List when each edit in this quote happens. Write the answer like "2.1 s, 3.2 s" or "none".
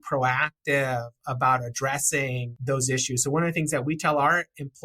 2.5 s